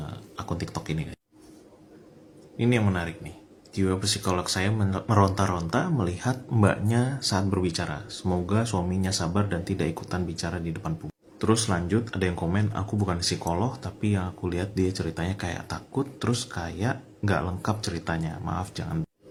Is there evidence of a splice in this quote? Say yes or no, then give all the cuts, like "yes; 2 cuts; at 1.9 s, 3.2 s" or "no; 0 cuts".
no; 0 cuts